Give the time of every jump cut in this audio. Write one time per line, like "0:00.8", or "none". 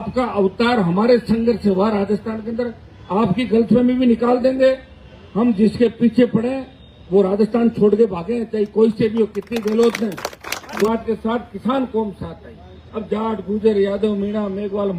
0:10.9